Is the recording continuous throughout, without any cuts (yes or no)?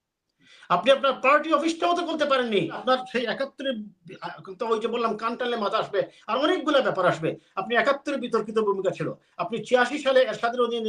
no